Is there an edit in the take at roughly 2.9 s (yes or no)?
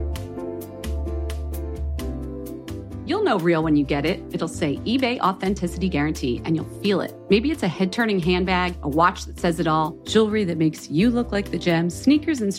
no